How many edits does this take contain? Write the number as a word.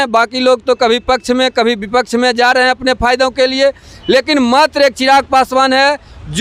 zero